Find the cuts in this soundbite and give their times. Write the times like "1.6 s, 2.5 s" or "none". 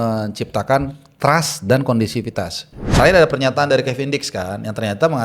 2.9 s